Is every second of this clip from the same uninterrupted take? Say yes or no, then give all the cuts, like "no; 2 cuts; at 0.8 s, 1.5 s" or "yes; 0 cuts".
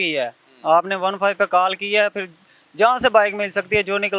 yes; 0 cuts